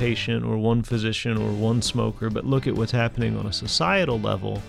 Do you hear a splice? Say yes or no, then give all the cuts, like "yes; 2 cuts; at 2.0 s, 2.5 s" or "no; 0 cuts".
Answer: no; 0 cuts